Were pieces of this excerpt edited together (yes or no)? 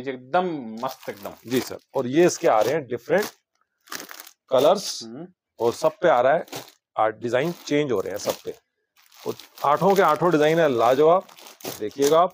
no